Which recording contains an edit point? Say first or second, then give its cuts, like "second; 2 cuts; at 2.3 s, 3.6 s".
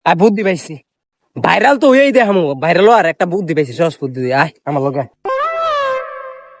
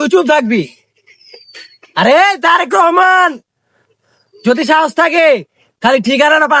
first; 1 cut; at 5.1 s